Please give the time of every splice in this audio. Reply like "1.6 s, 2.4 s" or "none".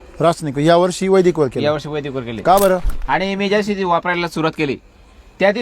2.9 s